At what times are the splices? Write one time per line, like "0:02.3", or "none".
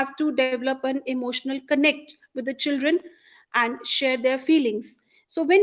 none